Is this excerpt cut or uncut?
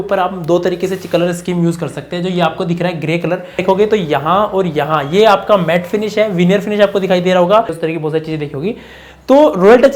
cut